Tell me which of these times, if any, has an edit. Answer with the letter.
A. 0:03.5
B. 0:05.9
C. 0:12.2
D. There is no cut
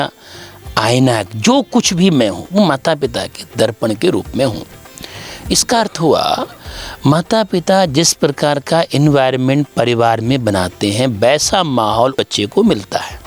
C